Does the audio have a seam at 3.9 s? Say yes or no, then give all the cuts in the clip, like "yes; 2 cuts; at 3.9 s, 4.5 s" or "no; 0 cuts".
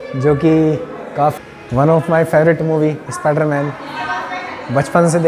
no; 1 cut; at 1.4 s